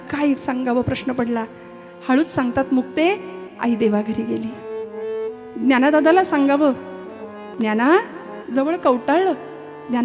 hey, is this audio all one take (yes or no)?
yes